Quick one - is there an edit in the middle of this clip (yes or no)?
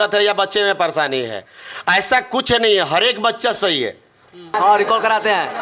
yes